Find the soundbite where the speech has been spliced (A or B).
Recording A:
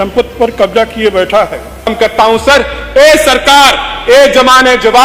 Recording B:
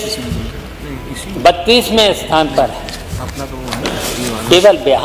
A